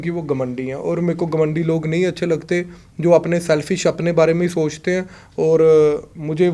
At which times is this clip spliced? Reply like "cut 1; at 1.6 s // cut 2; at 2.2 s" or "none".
none